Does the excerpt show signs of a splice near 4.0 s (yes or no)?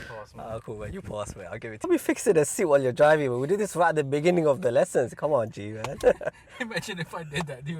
no